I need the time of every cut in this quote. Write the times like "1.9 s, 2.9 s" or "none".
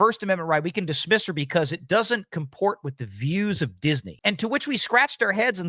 4.1 s